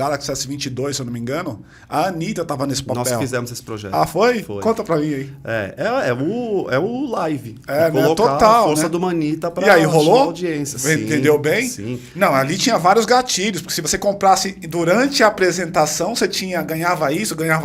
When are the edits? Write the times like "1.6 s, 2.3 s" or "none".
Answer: none

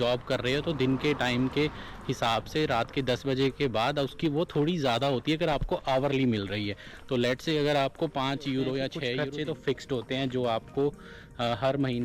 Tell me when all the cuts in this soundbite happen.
9.1 s

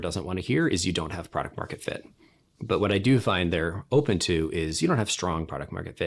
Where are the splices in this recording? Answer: none

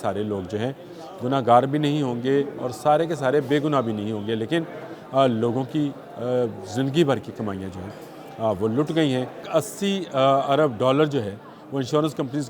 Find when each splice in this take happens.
9.4 s

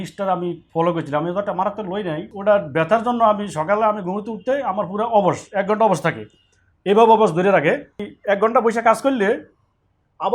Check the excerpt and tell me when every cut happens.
2.3 s, 8.1 s

